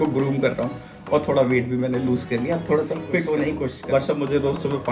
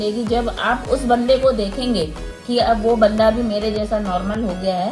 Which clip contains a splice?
first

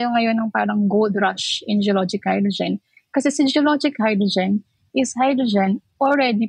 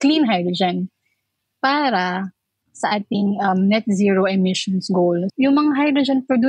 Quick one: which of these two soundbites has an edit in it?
second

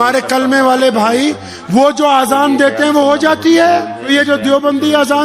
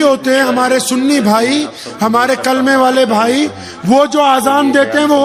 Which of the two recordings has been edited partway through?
first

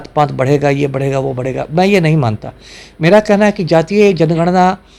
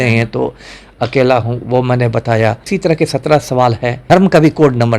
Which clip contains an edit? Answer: second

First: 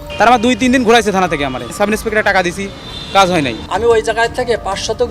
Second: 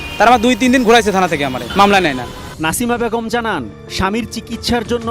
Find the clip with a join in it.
first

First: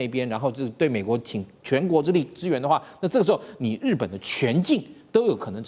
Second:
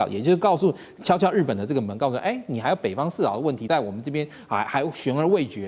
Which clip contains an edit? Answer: second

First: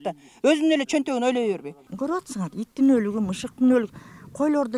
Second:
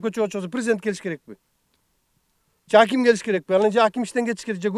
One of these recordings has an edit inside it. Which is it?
first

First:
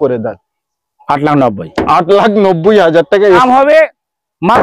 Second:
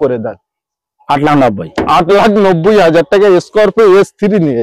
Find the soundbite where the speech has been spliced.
first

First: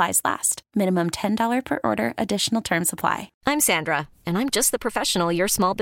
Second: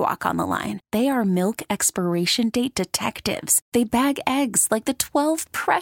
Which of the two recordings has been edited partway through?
first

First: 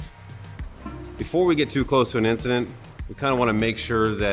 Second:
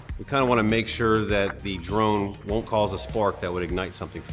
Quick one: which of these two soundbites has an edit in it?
first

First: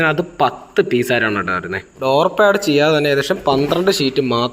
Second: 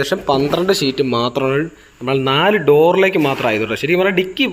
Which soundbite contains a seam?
first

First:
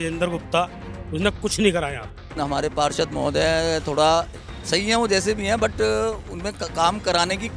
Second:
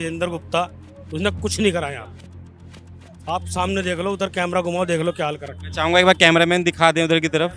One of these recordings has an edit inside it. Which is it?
first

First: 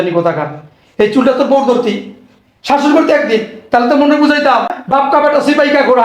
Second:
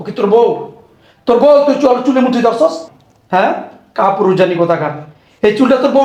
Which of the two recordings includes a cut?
first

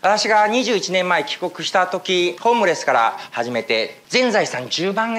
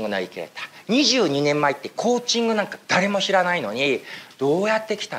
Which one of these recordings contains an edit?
first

